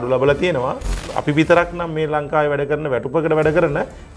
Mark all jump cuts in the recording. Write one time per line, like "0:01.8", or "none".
0:01.0